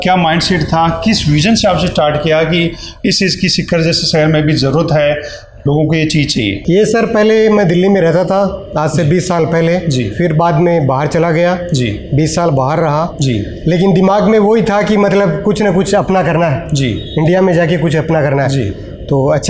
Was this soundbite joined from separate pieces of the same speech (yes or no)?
no